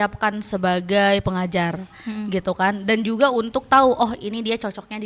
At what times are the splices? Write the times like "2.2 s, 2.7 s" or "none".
none